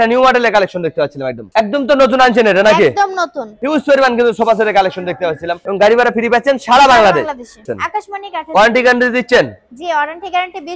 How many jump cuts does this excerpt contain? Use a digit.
3